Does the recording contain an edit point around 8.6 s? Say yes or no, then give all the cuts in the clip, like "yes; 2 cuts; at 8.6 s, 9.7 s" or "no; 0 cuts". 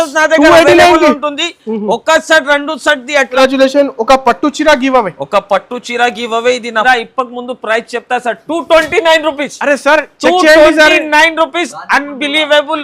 no; 2 cuts; at 3.4 s, 6.8 s